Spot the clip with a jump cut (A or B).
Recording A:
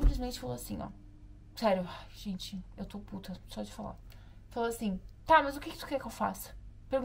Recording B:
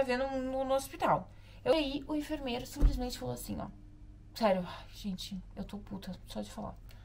B